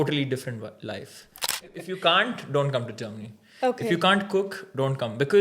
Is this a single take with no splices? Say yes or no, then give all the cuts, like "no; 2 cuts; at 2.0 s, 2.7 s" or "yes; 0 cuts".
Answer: no; 1 cut; at 1.6 s